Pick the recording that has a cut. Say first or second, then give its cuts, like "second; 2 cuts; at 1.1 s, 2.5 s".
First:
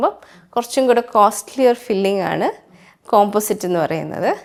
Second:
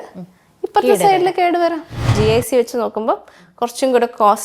second; 1 cut; at 2.1 s